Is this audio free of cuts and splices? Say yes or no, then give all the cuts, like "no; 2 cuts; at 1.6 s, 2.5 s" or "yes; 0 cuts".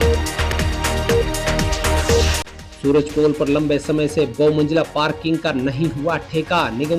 no; 1 cut; at 2.4 s